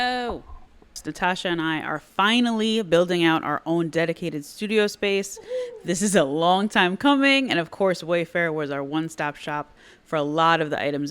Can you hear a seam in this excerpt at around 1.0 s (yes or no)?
yes